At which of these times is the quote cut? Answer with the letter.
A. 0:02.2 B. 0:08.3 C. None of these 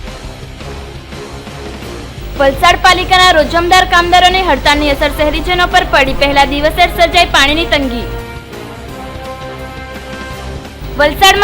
A